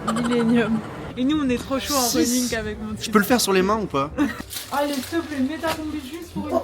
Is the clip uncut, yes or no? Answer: no